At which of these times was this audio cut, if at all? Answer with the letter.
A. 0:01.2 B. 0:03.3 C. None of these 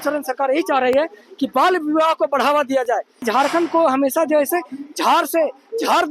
B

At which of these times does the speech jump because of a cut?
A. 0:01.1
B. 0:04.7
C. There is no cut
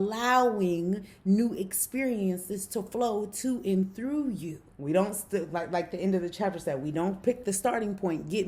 B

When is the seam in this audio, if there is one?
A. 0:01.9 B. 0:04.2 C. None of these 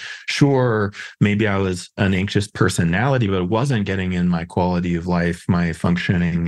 A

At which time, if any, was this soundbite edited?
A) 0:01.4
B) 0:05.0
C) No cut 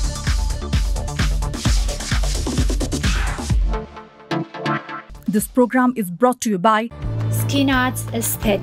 B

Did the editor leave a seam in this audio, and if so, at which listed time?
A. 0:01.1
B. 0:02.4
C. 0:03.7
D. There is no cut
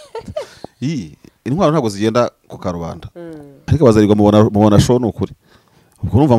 C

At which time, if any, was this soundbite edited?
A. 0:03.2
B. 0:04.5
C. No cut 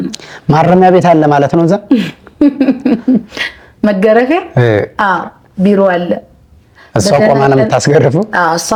C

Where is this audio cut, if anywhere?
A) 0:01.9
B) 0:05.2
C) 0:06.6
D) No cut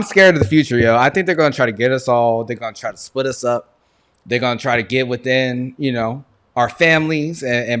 D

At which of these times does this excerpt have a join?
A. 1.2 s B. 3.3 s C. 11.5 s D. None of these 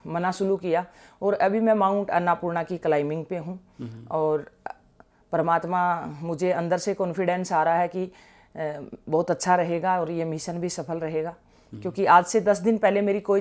D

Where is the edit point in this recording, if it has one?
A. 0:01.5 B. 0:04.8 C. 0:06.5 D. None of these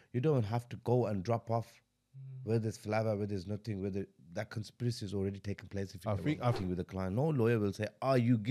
C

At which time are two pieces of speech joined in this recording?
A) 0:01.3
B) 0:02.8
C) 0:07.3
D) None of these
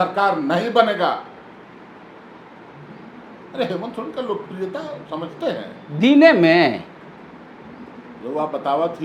D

